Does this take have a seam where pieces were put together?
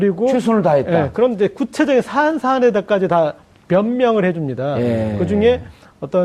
no; 0 cuts

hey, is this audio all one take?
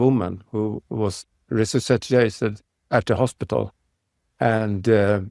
yes; 0 cuts

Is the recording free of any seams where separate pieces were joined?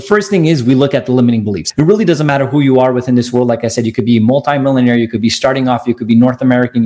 no; 1 cut; at 1.6 s

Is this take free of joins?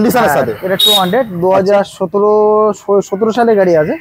yes; 0 cuts

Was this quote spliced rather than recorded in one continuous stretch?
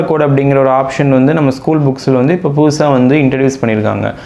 no; 0 cuts

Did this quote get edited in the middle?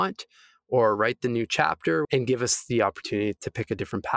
yes; 2 cuts; at 2.0 s, 3.4 s

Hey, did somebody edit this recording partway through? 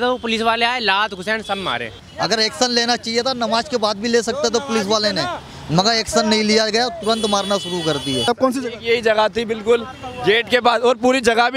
yes; 2 cuts; at 2.0 s, 8.3 s

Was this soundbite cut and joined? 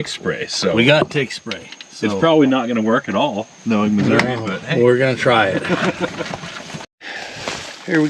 no; 0 cuts

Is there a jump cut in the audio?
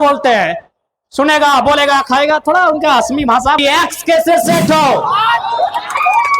yes; 1 cut; at 3.6 s

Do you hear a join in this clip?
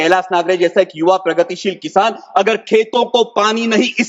no; 0 cuts

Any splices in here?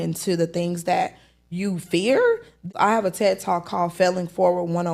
yes; 1 cut; at 2.7 s

